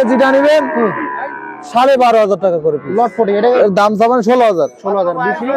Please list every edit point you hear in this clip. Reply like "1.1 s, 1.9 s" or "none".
3.6 s